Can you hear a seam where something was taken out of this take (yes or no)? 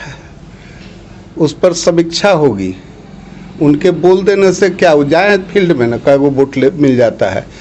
no